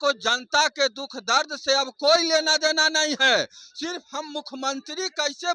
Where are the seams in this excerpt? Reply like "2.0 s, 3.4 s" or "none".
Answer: none